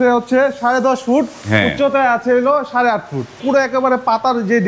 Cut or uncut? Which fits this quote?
cut